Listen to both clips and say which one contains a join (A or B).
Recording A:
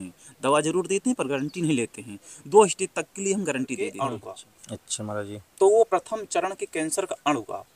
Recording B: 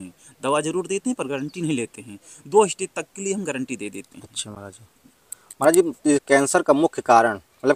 A